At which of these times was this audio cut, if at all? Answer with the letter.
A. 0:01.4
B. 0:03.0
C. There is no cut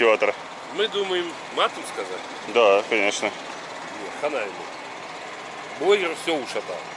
A